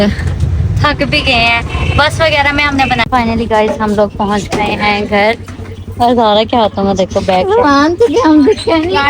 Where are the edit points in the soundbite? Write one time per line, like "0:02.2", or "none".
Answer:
0:03.0